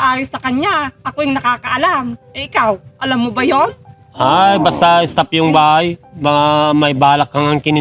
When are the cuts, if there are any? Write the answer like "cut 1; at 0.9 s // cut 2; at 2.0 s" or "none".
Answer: none

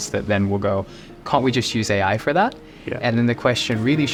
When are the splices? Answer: none

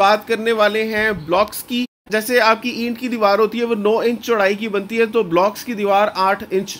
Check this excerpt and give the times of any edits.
cut 1; at 2.0 s

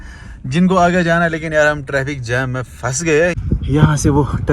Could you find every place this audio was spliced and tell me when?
cut 1; at 3.4 s

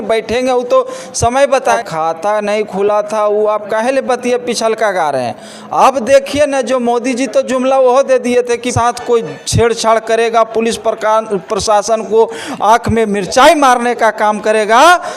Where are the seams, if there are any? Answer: cut 1; at 1.8 s // cut 2; at 8.7 s

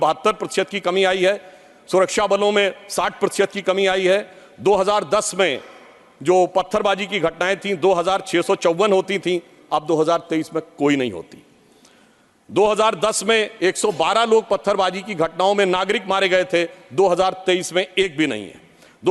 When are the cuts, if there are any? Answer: none

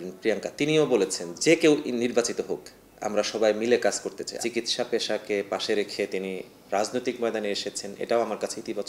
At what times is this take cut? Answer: cut 1; at 1.3 s // cut 2; at 4.4 s // cut 3; at 6.5 s

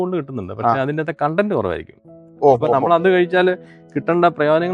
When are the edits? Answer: none

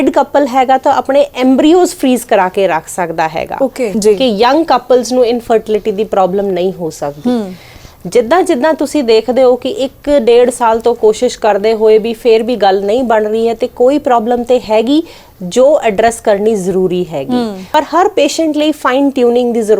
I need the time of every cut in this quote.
cut 1; at 3.9 s // cut 2; at 17.6 s

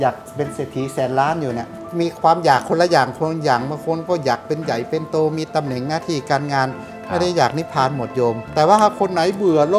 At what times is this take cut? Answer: cut 1; at 1.8 s // cut 2; at 8.4 s

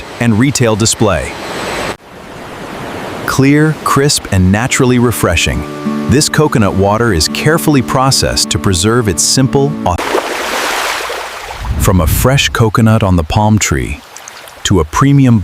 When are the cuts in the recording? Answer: cut 1; at 2.0 s

